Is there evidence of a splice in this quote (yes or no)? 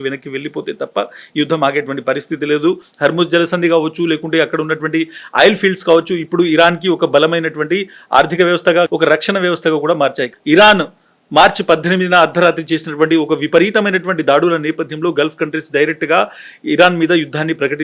yes